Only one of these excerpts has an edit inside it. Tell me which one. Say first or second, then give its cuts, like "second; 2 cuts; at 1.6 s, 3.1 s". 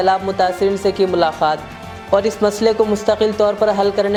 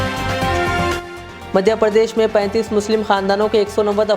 second; 1 cut; at 1.0 s